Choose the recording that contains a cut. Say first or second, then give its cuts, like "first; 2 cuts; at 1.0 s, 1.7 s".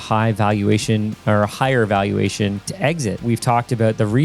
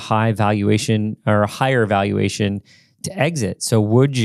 first; 1 cut; at 3.2 s